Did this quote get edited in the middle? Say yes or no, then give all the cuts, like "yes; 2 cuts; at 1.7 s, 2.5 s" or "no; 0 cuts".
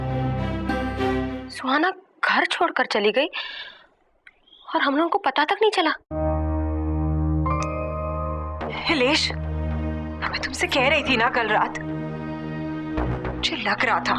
yes; 1 cut; at 1.5 s